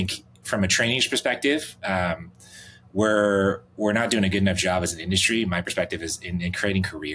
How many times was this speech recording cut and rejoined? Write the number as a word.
zero